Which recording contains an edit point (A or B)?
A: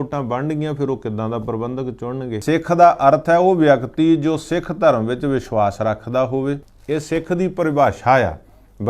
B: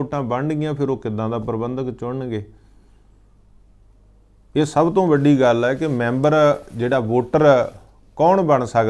A